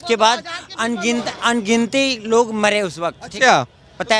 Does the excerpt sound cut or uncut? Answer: uncut